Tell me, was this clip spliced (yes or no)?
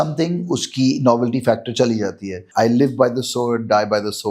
yes